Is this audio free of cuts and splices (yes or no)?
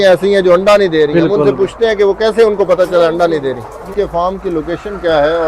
no